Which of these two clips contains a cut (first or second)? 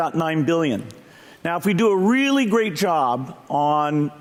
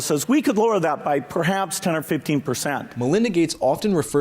second